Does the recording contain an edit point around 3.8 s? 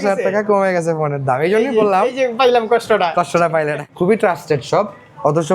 yes; 1 cut; at 3.8 s

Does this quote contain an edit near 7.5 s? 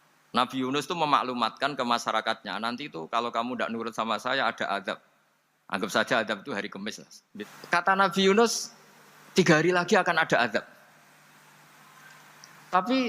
yes; 1 cut; at 7.5 s

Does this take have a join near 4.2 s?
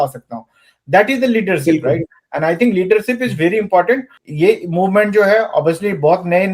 yes; 1 cut; at 4.2 s

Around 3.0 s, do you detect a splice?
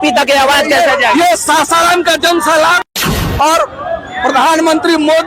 yes; 1 cut; at 3.0 s

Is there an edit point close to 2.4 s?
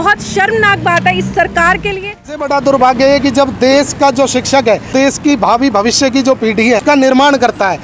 yes; 3 cuts; at 2.4 s, 4.9 s, 6.8 s

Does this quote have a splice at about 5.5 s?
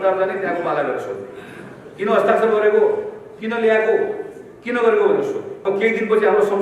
yes; 1 cut; at 5.5 s

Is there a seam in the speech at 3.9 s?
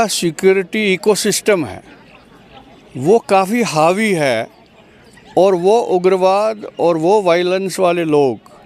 no; 0 cuts

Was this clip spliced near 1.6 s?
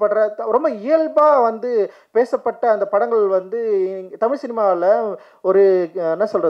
no; 0 cuts

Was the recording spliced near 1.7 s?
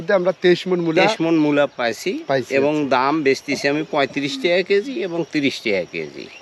no; 0 cuts

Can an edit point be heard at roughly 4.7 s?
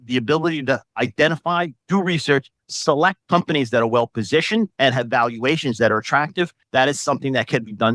yes; 4 cuts; at 0.9 s, 3.2 s, 4.7 s, 6.6 s

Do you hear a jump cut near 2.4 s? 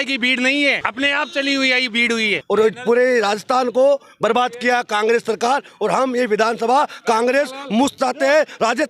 yes; 1 cut; at 2.4 s

